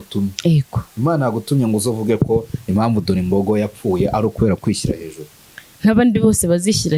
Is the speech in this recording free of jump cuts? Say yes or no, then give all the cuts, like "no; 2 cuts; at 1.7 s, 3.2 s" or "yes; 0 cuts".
yes; 0 cuts